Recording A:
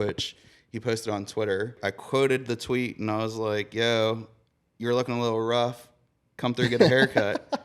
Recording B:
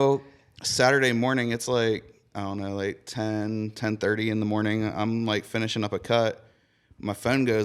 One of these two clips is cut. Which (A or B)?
A